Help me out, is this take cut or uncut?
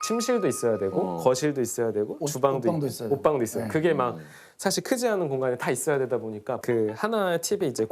cut